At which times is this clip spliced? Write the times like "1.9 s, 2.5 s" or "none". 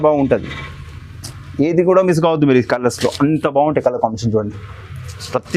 none